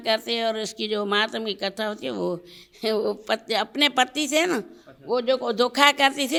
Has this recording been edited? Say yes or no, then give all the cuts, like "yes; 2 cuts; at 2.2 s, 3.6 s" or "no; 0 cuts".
no; 0 cuts